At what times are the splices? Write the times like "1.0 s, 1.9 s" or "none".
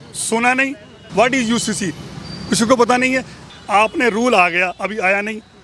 1.0 s, 3.5 s